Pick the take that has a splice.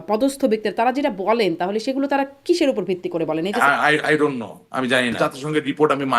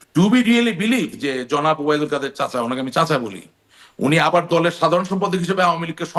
first; 2 cuts; at 3.5 s, 5.1 s

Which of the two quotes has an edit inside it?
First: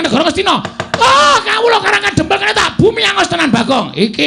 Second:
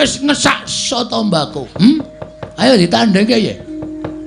second; 1 cut; at 1.6 s

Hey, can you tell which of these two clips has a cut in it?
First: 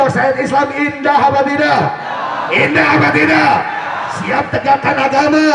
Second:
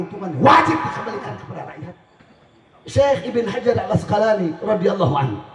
second; 1 cut; at 2.1 s

